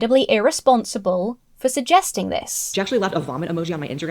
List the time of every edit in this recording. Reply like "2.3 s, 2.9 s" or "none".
2.6 s